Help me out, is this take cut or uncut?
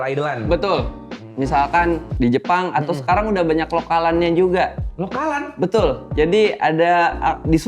cut